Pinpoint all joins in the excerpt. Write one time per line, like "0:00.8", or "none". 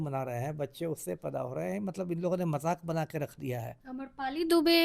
0:03.8